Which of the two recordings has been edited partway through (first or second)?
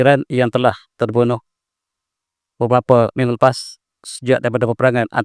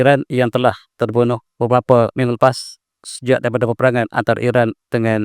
second